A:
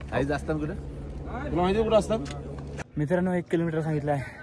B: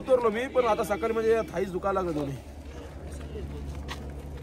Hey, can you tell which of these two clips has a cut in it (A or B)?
A